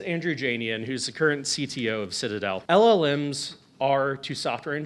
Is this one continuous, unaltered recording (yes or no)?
no